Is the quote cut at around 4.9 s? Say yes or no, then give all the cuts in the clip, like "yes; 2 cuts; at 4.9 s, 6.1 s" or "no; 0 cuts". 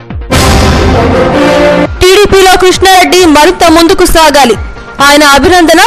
no; 1 cut; at 1.8 s